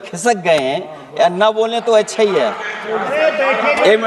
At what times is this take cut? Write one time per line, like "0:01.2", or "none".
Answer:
0:02.8